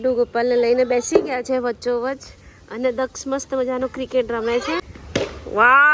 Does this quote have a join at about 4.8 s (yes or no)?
yes